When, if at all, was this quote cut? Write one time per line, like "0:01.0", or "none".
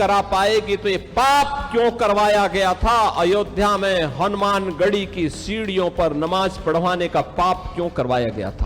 none